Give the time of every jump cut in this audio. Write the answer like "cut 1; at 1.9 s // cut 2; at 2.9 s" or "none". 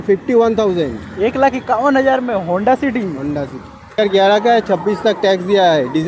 cut 1; at 4.0 s